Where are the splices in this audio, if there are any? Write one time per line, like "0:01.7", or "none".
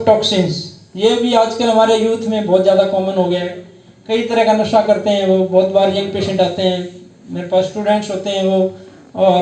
none

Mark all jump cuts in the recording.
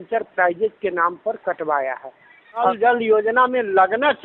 0:02.7

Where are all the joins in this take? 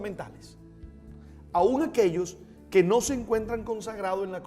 0:01.5

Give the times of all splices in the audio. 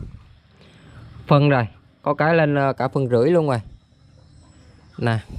none

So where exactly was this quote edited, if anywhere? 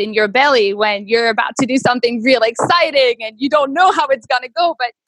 none

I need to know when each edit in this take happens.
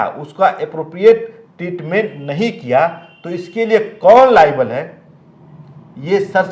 none

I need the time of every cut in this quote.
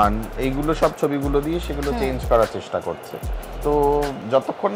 none

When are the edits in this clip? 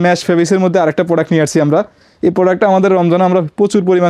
none

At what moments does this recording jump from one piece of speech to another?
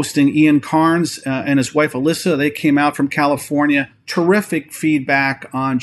none

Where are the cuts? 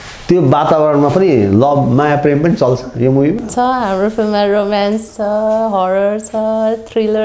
none

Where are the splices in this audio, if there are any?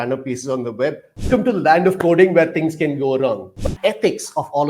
0:01.3
0:03.7

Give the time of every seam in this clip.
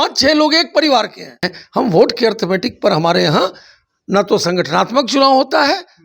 0:01.6

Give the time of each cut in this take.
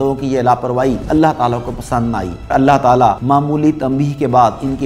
0:01.0
0:02.5
0:03.2

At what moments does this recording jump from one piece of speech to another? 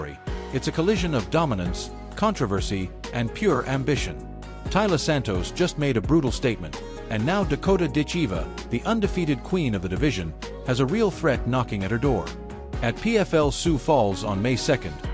0:13.3

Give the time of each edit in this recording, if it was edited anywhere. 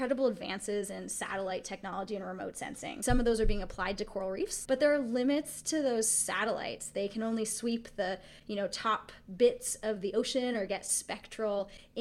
0:03.0
0:04.6

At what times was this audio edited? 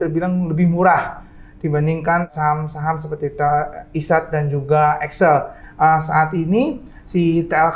0:02.3
0:05.6

